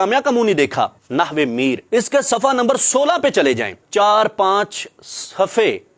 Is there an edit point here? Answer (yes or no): yes